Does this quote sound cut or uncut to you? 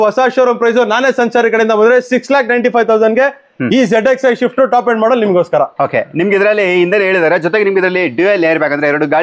uncut